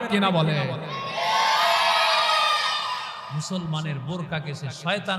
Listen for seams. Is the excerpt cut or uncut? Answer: cut